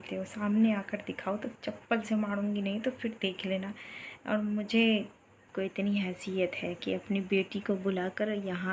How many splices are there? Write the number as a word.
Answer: one